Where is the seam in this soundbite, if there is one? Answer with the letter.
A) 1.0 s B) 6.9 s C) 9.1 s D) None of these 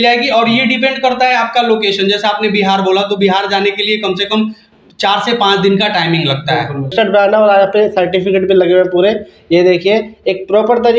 B